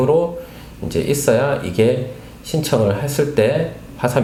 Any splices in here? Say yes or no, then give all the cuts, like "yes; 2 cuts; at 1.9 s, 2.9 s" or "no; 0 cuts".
no; 0 cuts